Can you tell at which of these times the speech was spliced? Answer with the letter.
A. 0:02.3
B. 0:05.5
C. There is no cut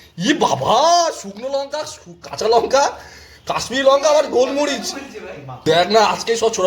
B